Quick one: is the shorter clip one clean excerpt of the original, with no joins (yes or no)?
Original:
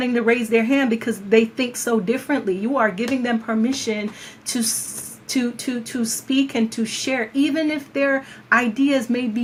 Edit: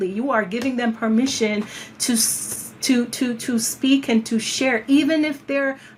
yes